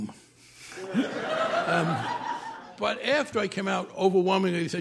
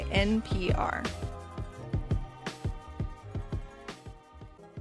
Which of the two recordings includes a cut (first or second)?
first